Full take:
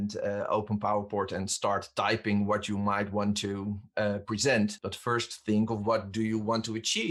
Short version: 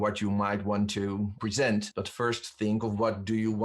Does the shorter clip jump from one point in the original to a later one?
yes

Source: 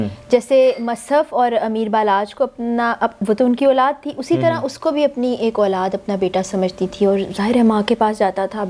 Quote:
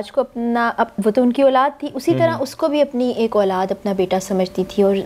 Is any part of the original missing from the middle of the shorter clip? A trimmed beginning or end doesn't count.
no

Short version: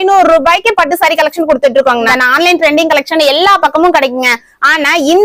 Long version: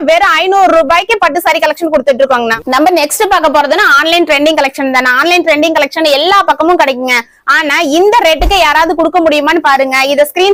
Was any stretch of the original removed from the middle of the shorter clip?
yes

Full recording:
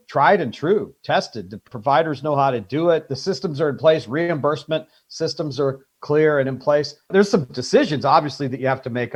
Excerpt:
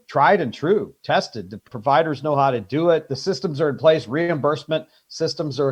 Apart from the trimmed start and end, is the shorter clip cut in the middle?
no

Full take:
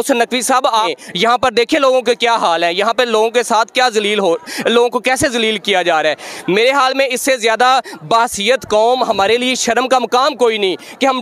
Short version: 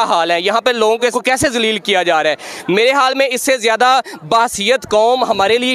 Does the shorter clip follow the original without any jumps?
no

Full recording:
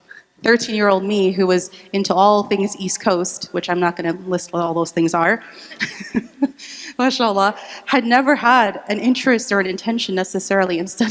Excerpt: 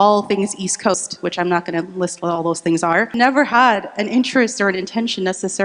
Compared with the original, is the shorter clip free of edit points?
no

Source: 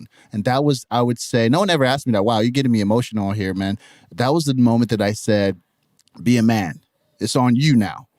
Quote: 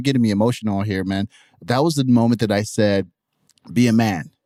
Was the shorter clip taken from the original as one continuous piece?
yes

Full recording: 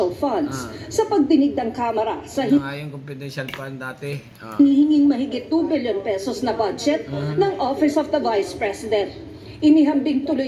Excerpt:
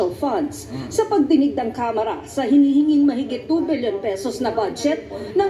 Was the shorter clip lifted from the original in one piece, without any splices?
no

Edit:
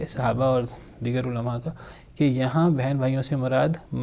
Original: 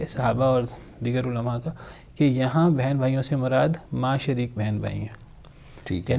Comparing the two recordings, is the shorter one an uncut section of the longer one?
yes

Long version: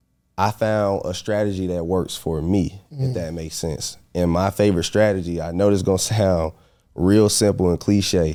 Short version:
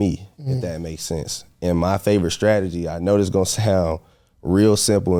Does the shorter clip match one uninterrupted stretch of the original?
yes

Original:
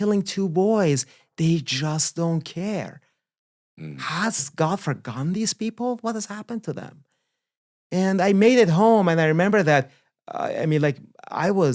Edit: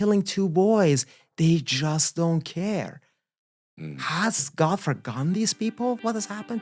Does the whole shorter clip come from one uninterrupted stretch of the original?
yes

